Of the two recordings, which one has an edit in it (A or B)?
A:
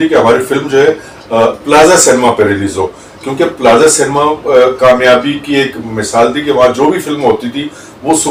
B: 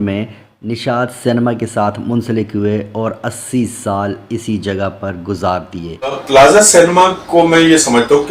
B